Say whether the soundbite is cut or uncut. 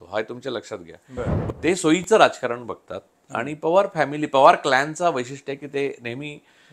cut